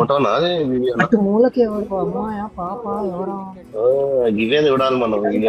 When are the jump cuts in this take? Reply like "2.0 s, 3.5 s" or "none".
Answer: 3.6 s